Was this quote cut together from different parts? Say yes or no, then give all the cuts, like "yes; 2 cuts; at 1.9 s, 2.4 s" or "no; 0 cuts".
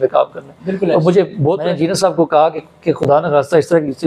yes; 1 cut; at 1.6 s